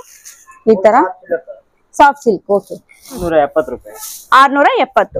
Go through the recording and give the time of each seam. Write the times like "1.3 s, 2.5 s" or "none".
3.2 s